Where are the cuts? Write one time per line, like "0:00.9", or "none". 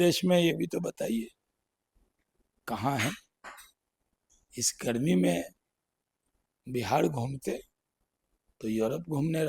none